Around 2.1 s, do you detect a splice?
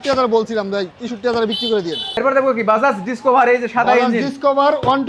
yes; 1 cut; at 2.1 s

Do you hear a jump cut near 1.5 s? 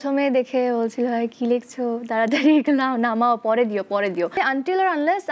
no; 1 cut; at 4.3 s

